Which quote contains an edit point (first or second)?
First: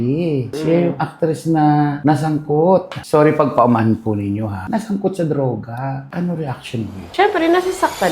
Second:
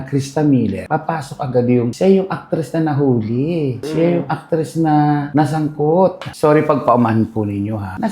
first